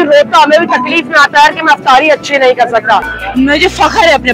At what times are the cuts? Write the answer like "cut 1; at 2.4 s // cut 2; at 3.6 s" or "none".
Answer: cut 1; at 3.2 s